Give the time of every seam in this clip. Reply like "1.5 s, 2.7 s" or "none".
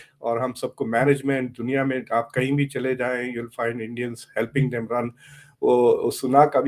none